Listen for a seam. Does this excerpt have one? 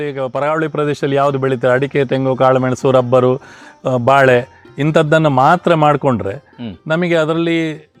no; 0 cuts

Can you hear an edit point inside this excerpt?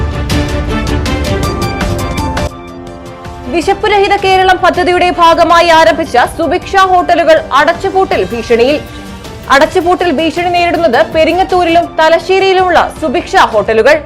yes; 1 cut; at 2.4 s

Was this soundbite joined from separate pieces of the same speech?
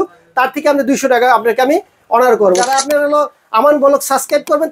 yes; 1 cut; at 2.6 s

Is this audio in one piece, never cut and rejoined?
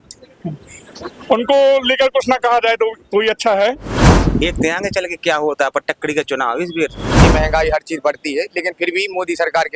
no; 2 cuts; at 4.1 s, 7.2 s

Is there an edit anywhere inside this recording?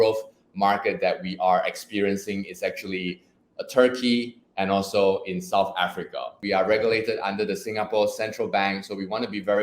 yes; 1 cut; at 6.4 s

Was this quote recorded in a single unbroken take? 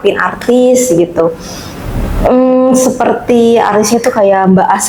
yes; 0 cuts

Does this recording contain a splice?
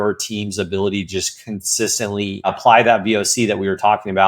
yes; 1 cut; at 2.5 s

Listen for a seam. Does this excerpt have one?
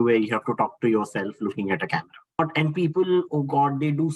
yes; 1 cut; at 2.5 s

